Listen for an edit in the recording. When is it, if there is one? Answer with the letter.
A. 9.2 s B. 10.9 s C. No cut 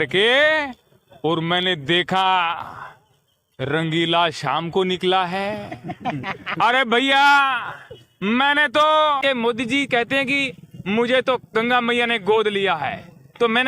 A